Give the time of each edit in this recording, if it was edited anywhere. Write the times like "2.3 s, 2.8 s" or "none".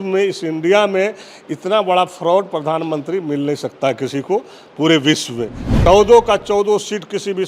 5.9 s